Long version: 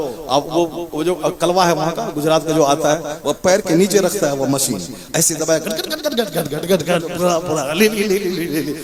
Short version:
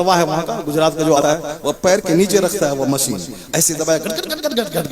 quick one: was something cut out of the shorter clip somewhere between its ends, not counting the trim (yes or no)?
yes